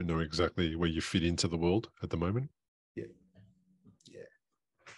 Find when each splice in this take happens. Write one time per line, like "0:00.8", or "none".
none